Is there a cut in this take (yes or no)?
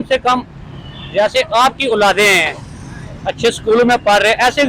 no